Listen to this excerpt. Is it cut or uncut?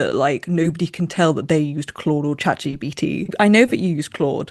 uncut